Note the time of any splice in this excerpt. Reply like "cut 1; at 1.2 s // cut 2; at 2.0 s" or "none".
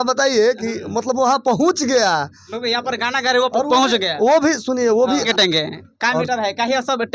cut 1; at 5.3 s